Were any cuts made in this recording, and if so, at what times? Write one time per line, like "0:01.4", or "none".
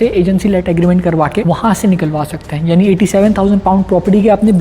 0:01.4